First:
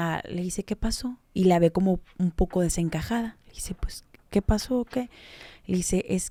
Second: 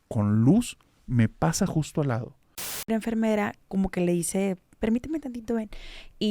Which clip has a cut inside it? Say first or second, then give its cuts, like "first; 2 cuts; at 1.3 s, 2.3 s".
second; 1 cut; at 2.9 s